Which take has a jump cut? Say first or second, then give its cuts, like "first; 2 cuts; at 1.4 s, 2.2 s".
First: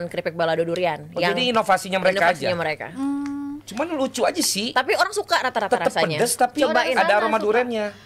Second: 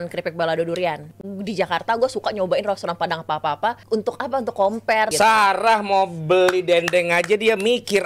second; 3 cuts; at 1.1 s, 3.8 s, 5.1 s